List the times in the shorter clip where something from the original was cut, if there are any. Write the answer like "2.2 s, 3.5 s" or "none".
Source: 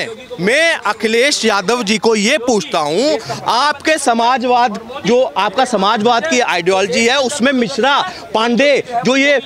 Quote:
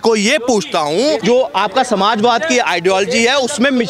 1.2 s